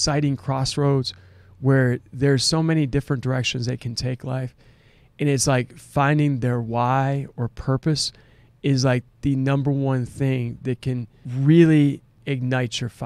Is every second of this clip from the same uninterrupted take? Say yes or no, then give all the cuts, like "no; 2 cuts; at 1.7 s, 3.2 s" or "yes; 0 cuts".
no; 2 cuts; at 11.2 s, 12.2 s